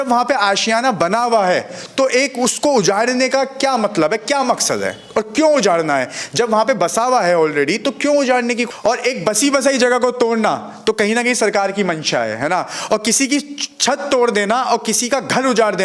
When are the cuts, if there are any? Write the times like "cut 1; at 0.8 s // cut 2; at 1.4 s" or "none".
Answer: cut 1; at 8.6 s